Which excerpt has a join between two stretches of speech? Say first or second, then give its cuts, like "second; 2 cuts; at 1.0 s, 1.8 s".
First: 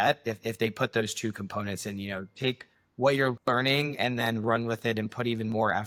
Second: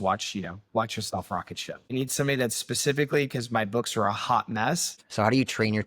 second; 2 cuts; at 1.9 s, 4.9 s